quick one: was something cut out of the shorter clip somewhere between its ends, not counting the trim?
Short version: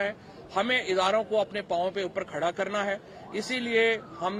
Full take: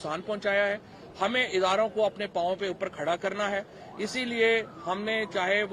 no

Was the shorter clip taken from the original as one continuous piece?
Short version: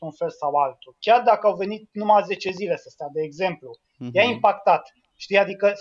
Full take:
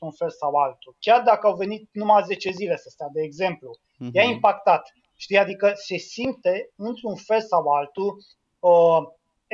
yes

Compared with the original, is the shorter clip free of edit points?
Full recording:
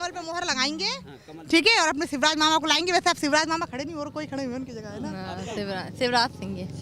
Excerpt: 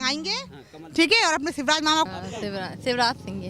no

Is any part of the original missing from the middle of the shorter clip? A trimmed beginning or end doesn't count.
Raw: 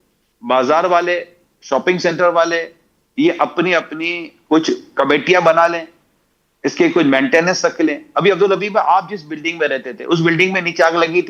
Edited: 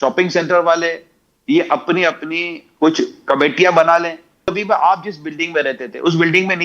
yes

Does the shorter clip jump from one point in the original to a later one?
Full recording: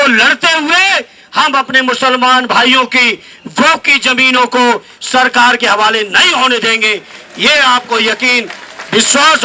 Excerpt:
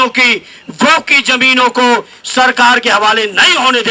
no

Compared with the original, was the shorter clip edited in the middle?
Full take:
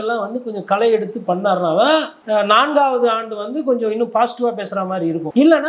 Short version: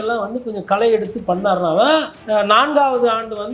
no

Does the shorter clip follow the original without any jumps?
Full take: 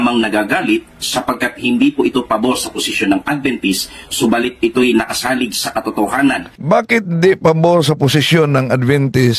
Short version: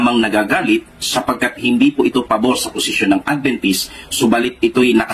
yes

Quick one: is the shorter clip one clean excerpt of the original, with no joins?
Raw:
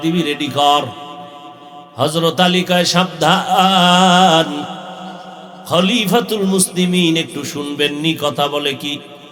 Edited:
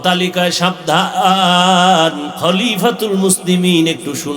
no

